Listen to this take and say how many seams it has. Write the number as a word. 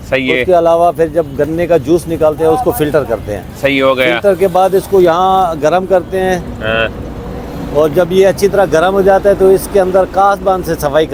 zero